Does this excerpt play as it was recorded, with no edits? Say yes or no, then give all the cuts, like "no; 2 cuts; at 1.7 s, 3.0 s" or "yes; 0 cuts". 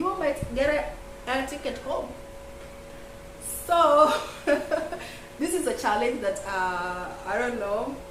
yes; 0 cuts